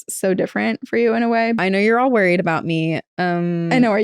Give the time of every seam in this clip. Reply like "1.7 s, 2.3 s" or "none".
1.6 s